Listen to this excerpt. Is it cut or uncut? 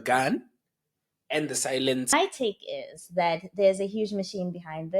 cut